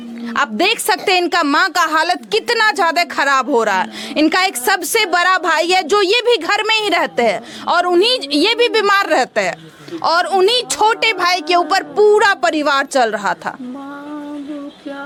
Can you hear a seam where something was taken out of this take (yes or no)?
no